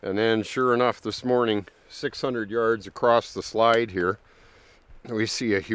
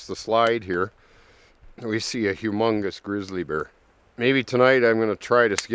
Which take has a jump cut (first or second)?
second